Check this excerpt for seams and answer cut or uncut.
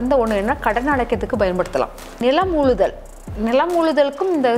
cut